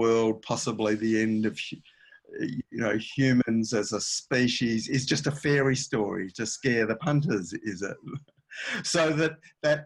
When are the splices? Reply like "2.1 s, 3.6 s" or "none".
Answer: none